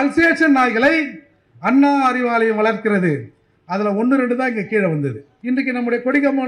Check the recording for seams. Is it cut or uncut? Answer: cut